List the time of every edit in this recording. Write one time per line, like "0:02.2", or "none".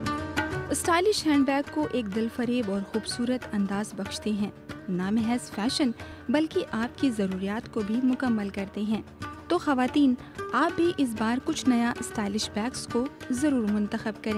none

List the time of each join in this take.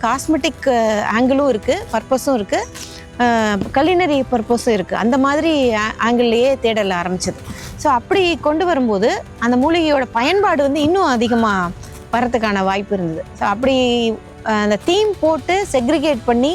none

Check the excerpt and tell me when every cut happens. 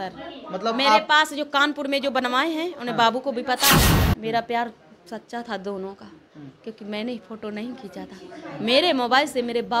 0:04.0

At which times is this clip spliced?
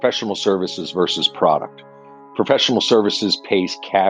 none

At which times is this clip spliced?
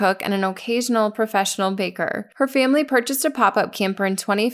0:02.2

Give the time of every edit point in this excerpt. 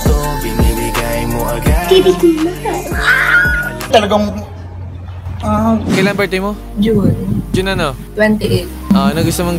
0:05.9

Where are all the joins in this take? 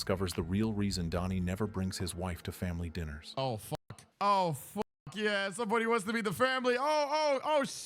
0:03.8

